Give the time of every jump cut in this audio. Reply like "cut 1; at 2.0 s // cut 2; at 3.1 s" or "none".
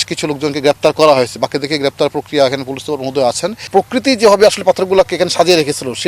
cut 1; at 3.6 s